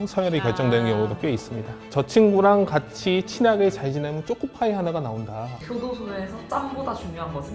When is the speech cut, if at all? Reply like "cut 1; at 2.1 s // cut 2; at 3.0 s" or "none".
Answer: cut 1; at 1.8 s // cut 2; at 5.4 s